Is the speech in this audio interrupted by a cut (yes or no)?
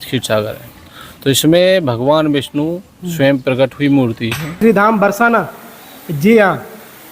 yes